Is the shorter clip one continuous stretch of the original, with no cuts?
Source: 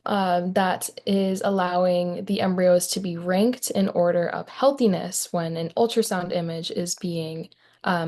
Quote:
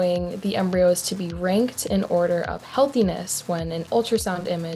yes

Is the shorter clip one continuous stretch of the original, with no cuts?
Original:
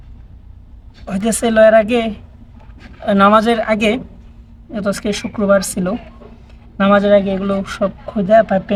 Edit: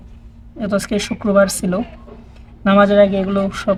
yes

